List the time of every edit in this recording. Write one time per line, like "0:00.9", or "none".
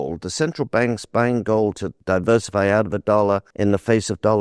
0:01.9
0:03.5